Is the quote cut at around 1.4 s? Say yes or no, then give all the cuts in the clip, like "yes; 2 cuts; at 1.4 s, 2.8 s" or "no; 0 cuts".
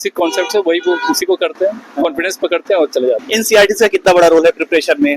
no; 1 cut; at 3.2 s